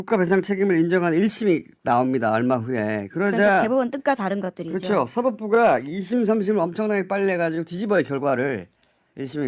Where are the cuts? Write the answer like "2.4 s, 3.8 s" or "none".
1.4 s